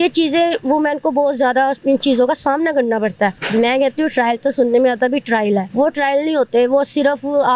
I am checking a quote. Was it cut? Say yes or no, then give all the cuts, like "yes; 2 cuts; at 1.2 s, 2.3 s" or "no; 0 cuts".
yes; 3 cuts; at 1.8 s, 3.4 s, 5.7 s